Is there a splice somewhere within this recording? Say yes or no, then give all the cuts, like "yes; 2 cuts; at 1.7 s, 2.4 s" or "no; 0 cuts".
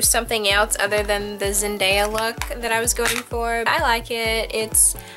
yes; 1 cut; at 3.7 s